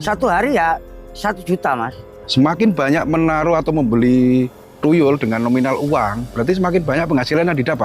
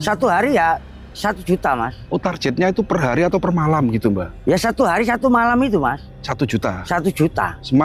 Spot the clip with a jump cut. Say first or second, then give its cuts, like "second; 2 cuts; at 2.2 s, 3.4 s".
first; 2 cuts; at 2.1 s, 4.8 s